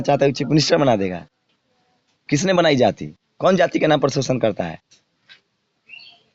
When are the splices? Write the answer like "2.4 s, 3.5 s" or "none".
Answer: none